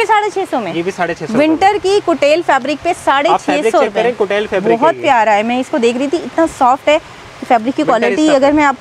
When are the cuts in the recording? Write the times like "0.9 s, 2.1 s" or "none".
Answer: none